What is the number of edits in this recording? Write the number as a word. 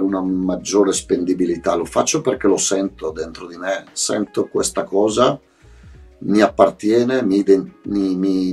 zero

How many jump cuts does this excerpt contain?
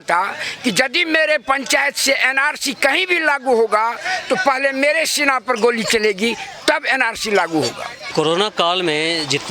one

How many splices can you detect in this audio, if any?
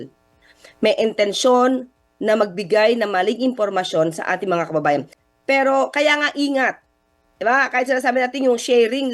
one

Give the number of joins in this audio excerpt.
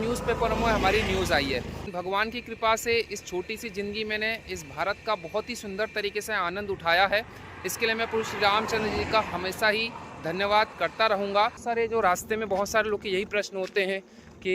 two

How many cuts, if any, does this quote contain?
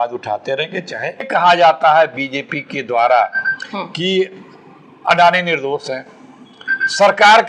one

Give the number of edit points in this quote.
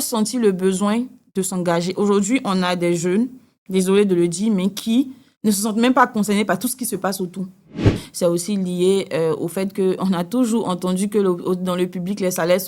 one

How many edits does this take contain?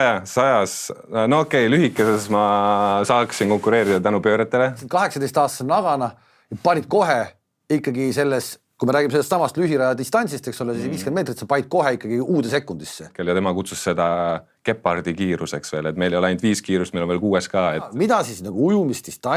three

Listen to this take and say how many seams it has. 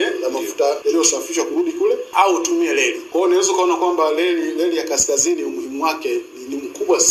three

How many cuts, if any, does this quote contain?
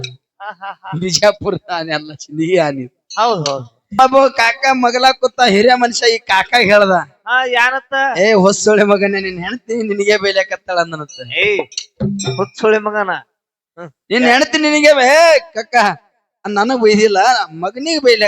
one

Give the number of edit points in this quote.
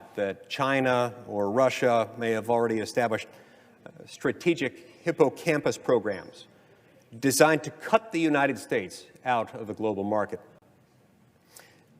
one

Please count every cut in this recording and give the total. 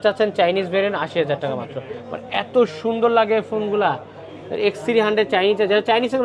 zero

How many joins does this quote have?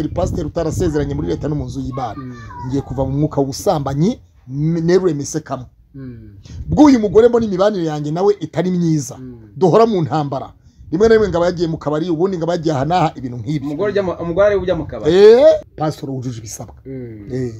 one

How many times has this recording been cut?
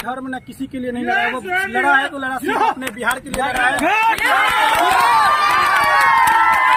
zero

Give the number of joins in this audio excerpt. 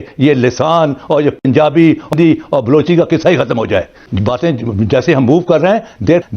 one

